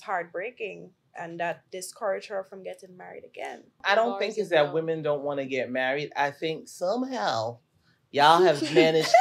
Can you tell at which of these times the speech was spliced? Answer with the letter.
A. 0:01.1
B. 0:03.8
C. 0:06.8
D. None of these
B